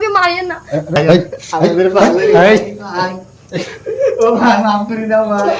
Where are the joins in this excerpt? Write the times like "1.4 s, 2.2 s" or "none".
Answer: 1.0 s